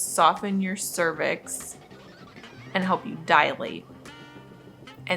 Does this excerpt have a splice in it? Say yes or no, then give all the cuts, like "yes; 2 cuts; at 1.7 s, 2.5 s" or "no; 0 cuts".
no; 0 cuts